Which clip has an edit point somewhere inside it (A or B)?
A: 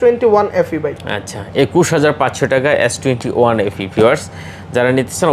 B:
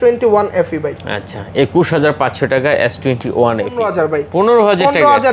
B